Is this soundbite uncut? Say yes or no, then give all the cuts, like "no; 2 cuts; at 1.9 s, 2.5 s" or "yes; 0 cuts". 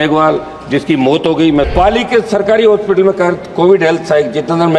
no; 1 cut; at 1.7 s